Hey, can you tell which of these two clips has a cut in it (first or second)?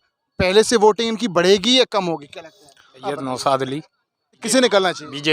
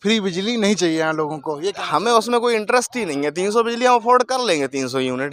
first